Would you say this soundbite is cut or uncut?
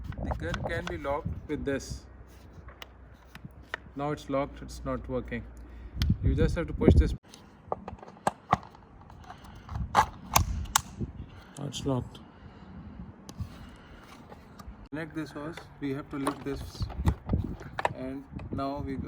cut